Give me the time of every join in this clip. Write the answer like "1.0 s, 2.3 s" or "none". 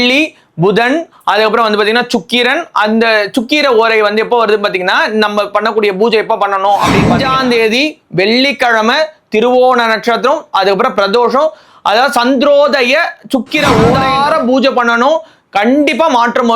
7.1 s, 14.0 s

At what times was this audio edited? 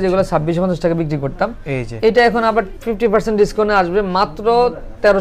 none

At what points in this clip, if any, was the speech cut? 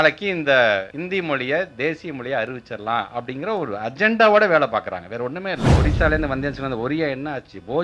0.9 s, 5.8 s

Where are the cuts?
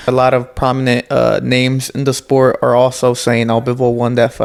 none

